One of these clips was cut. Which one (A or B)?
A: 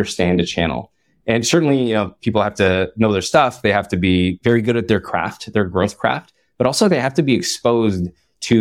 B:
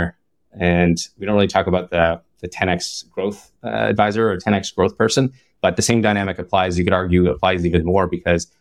A